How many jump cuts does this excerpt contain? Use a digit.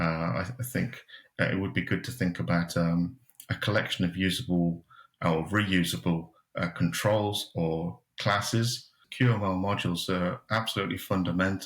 1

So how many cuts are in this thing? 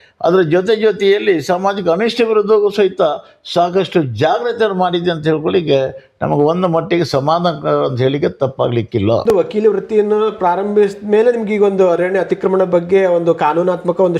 0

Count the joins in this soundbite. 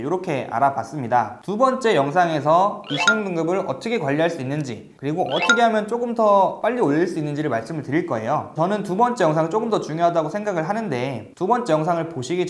0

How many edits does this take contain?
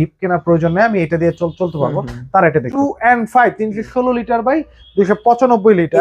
1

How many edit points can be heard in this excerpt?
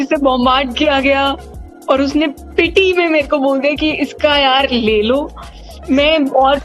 0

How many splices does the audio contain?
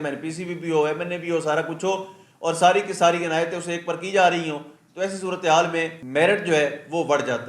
1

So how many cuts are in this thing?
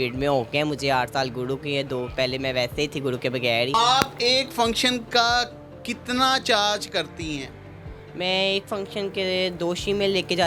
1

